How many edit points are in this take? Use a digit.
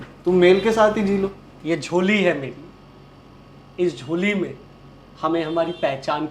1